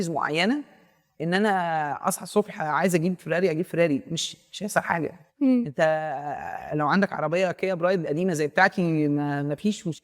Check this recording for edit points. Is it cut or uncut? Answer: uncut